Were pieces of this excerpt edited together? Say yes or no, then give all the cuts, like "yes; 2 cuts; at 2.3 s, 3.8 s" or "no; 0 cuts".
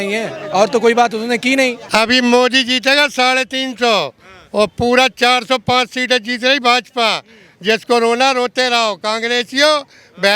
yes; 1 cut; at 1.8 s